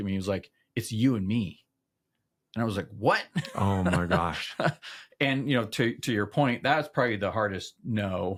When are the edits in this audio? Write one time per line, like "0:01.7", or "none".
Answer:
none